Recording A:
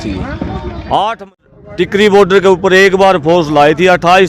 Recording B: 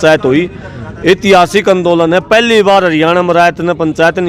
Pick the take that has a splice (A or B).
A